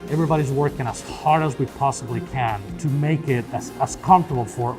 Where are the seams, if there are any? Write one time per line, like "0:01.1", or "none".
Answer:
0:02.7
0:03.5